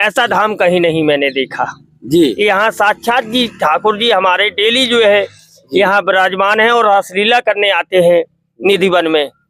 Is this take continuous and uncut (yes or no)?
yes